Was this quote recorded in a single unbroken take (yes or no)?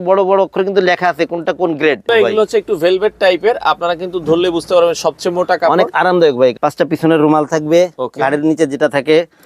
no